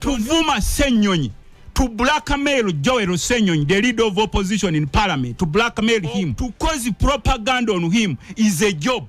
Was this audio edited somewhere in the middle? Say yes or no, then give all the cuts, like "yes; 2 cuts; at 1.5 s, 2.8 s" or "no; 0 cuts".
yes; 1 cut; at 6.4 s